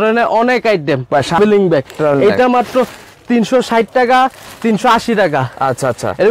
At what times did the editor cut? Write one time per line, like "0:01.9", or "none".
0:01.4